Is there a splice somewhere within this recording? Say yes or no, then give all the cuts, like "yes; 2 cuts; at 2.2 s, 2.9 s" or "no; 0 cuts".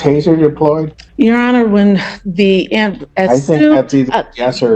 yes; 1 cut; at 1.0 s